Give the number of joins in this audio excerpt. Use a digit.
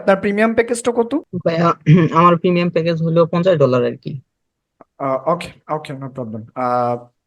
1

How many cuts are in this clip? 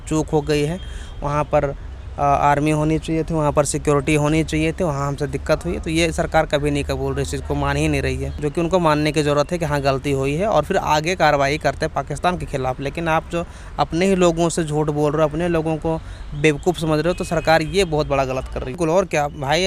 1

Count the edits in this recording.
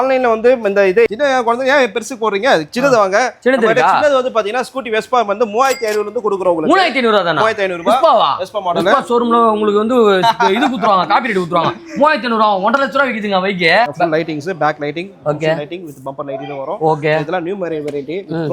2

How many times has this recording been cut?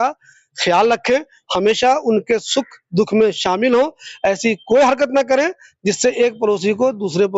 0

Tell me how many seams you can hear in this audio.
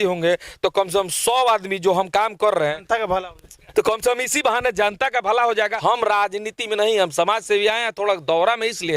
1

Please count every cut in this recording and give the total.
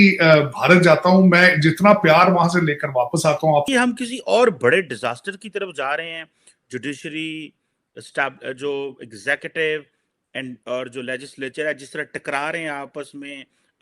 1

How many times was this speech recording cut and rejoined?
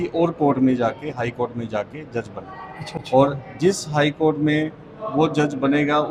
0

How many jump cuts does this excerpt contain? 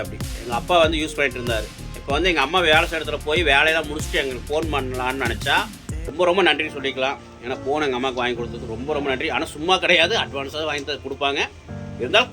1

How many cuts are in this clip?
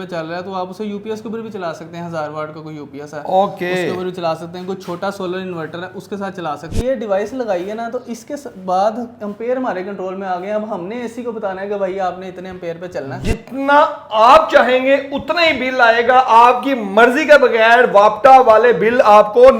2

